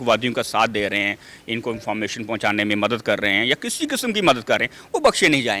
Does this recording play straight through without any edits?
yes; 0 cuts

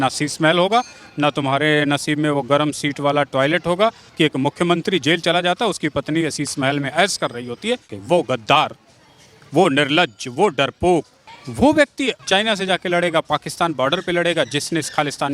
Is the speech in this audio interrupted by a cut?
yes; 2 cuts; at 4.0 s, 7.9 s

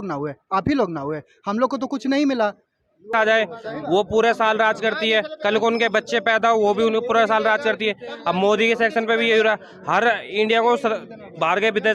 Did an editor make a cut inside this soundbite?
yes; 1 cut; at 3.1 s

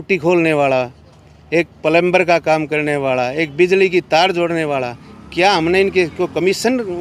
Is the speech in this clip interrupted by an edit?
no; 0 cuts

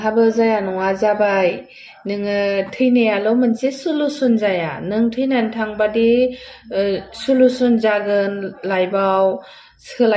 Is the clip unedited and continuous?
yes; 0 cuts

